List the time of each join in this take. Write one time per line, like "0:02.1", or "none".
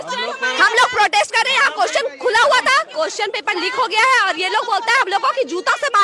none